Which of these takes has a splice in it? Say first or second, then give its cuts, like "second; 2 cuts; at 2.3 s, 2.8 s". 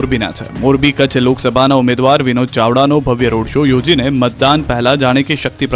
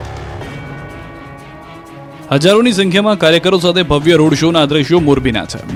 first; 1 cut; at 1.7 s